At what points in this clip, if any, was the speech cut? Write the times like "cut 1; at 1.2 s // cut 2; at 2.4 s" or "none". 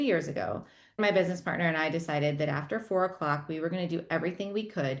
cut 1; at 1.0 s